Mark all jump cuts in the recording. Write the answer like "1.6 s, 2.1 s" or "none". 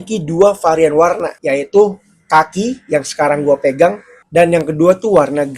1.3 s